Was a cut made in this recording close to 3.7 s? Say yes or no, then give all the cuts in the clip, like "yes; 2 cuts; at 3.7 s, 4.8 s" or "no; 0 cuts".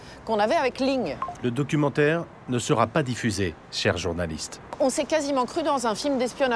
yes; 3 cuts; at 1.2 s, 3.7 s, 4.8 s